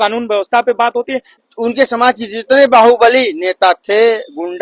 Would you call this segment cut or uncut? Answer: cut